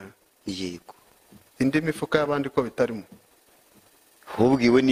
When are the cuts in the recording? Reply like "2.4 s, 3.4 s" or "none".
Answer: none